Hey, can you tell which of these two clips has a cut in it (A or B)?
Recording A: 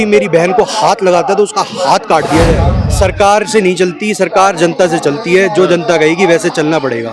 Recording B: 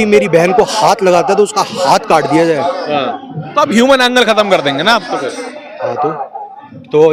A